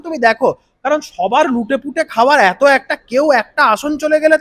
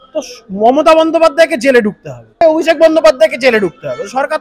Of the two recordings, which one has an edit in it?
second; 1 cut; at 2.4 s

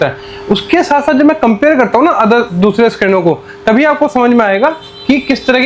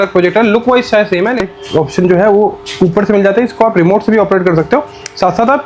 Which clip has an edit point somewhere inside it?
second; 1 cut; at 1.4 s

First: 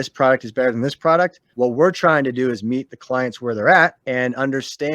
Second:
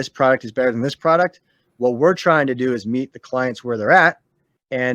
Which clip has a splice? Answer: first; 2 cuts; at 1.4 s, 4.0 s

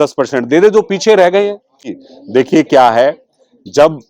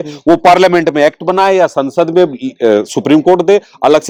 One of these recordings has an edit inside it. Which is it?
first; 1 cut; at 1.9 s

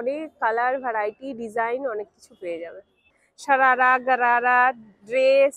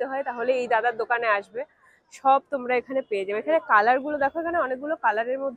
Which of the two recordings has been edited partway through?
first; 1 cut; at 3.0 s

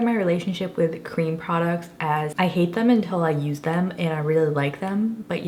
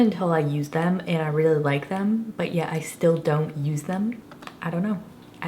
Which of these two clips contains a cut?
second; 1 cut; at 4.2 s

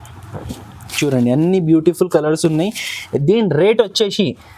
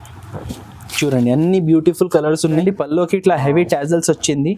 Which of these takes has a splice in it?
second; 1 cut; at 2.5 s

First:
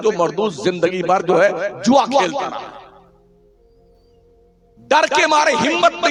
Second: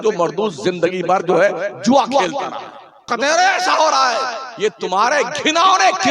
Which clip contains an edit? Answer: second; 1 cut; at 3.1 s

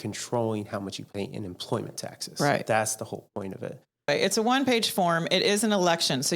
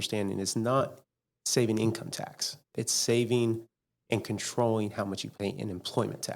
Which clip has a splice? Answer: first; 1 cut; at 4.1 s

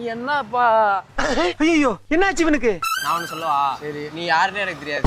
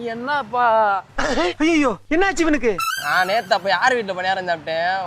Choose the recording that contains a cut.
first; 1 cut; at 2.9 s

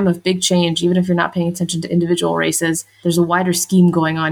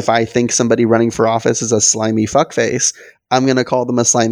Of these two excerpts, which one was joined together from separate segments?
first; 1 cut; at 2.9 s

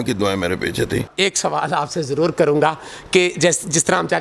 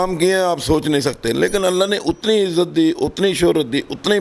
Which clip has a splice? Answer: first; 1 cut; at 1.0 s

